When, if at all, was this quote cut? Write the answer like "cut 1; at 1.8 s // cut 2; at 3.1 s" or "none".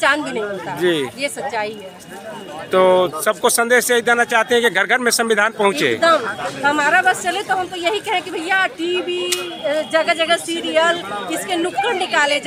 none